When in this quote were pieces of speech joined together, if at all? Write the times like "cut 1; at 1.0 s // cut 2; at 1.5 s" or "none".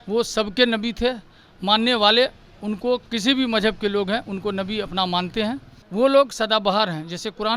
cut 1; at 5.8 s